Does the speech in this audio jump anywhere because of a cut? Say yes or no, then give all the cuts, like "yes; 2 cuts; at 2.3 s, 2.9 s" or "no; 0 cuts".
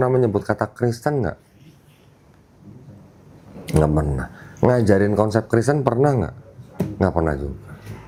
no; 0 cuts